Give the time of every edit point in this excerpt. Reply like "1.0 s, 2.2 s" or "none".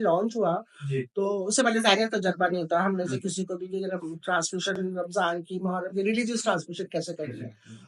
none